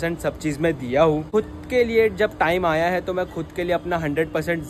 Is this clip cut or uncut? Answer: cut